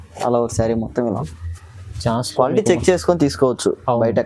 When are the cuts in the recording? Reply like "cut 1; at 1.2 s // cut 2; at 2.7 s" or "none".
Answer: cut 1; at 1.3 s